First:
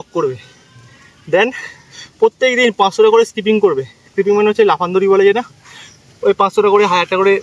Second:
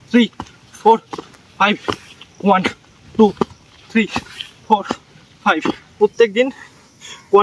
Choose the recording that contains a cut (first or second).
second